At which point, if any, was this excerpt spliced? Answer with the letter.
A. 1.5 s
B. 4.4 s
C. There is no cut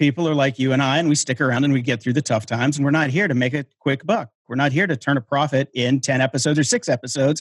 A